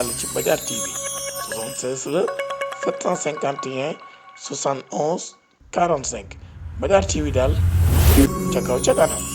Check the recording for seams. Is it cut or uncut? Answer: cut